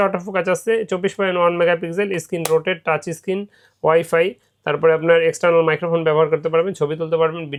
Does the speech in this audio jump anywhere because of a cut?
no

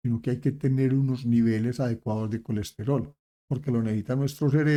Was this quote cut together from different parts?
no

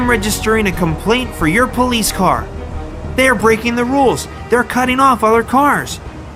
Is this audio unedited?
no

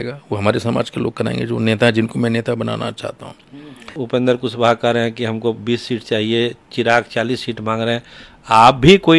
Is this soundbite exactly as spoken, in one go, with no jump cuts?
no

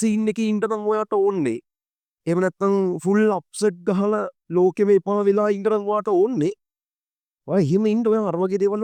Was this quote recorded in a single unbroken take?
yes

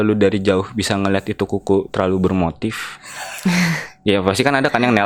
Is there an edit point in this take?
no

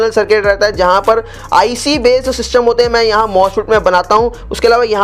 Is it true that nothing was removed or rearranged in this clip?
yes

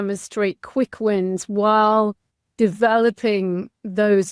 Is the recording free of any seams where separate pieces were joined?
yes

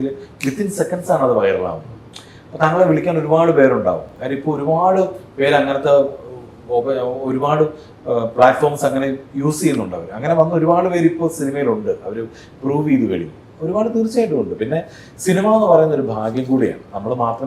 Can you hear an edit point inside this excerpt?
no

